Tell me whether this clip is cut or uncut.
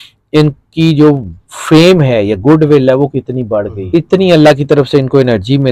cut